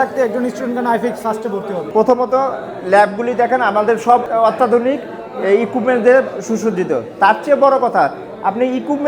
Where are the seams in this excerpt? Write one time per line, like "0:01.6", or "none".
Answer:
0:01.8
0:04.3